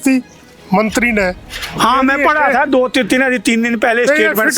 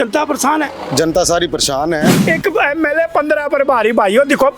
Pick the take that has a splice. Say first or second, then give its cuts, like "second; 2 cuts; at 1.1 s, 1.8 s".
second; 1 cut; at 2.2 s